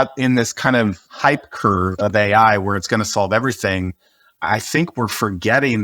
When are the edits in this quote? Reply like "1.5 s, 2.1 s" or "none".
1.1 s